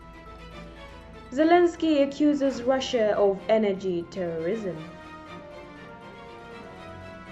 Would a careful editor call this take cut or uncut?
cut